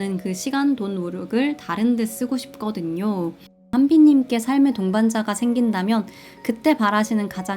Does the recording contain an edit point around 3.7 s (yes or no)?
yes